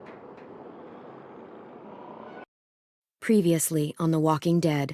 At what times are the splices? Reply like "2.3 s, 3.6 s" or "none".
2.5 s